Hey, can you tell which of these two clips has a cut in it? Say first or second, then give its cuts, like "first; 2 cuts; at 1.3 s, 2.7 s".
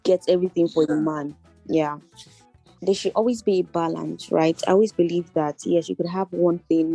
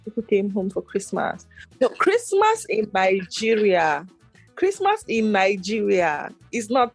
first; 1 cut; at 2.7 s